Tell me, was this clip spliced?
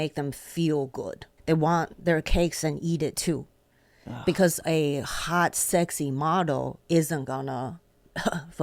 yes; 1 cut; at 1.3 s

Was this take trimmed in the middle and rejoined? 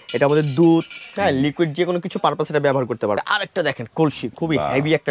yes; 1 cut; at 3.2 s

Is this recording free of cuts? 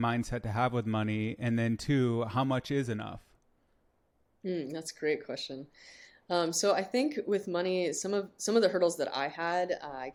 yes; 0 cuts

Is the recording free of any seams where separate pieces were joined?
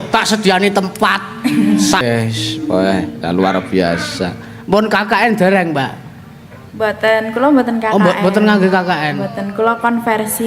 no; 1 cut; at 2.0 s

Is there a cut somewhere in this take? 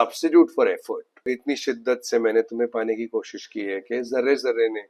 yes; 1 cut; at 1.2 s

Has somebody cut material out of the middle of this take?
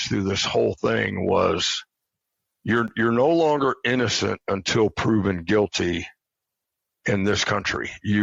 no; 0 cuts

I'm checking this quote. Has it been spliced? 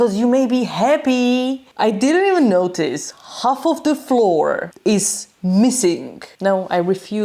yes; 3 cuts; at 1.7 s, 4.7 s, 6.2 s

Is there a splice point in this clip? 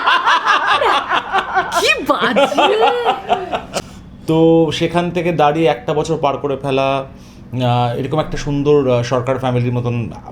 yes; 1 cut; at 3.7 s

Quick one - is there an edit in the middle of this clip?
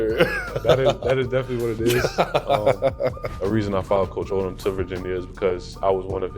yes; 1 cut; at 3.4 s

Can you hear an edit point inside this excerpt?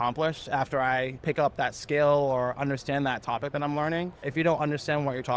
yes; 2 cuts; at 1.1 s, 4.2 s

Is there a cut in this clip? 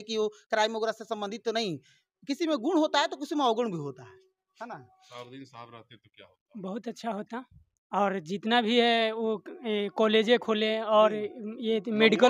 no; 0 cuts

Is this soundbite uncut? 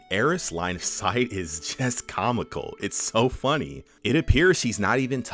yes; 0 cuts

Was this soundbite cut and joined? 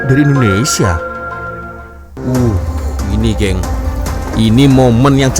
yes; 1 cut; at 2.0 s

